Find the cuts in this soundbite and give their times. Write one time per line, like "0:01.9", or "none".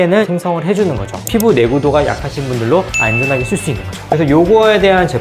none